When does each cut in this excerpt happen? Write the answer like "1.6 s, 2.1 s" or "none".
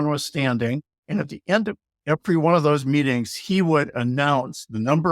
0.9 s